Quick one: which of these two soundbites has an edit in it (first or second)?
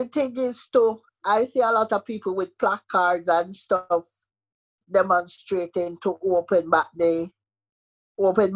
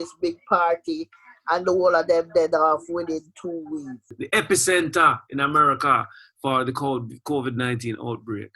second